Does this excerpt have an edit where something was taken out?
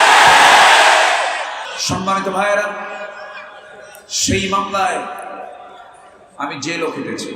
yes; 1 cut; at 1.7 s

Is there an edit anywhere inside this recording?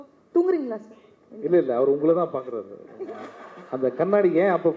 no; 0 cuts

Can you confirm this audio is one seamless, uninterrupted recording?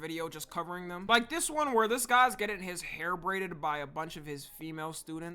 no; 1 cut; at 1.0 s

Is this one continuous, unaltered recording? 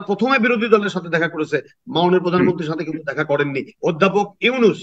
no; 1 cut; at 3.7 s

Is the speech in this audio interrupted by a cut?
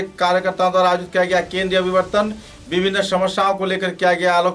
no; 0 cuts

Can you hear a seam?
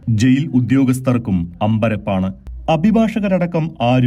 no; 0 cuts

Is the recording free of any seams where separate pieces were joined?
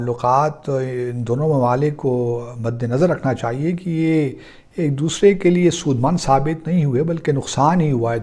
yes; 0 cuts

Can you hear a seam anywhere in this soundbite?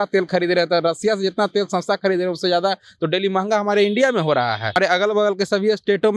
yes; 1 cut; at 4.8 s

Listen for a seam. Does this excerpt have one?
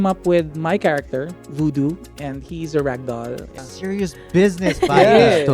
yes; 2 cuts; at 1.4 s, 3.6 s

